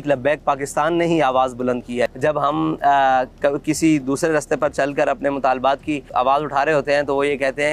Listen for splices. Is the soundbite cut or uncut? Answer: cut